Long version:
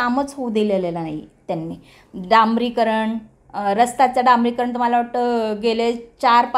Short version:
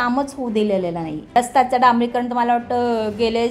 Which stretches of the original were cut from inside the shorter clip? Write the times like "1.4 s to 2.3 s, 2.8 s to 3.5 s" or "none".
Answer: 1.3 s to 3.8 s

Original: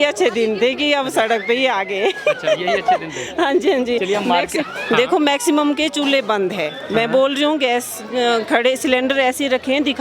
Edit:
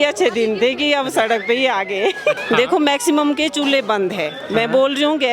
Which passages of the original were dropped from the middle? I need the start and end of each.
2.4 s to 4.8 s

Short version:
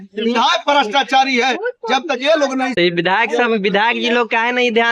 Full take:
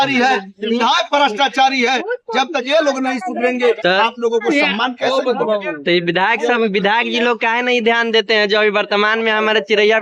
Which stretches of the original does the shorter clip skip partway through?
3.2 s to 5.8 s

